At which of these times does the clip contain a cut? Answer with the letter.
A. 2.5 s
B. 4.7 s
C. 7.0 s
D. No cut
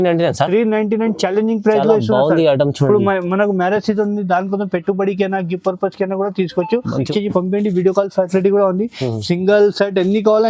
C